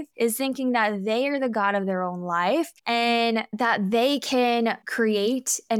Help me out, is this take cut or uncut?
uncut